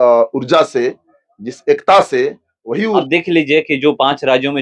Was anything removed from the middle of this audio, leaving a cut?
yes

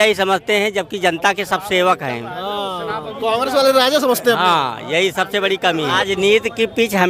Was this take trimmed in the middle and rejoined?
yes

